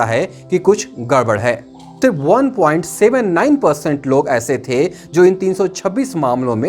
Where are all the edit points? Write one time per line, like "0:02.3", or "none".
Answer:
0:02.0